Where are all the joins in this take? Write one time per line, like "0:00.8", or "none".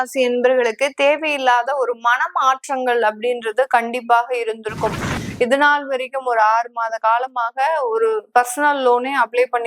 0:05.2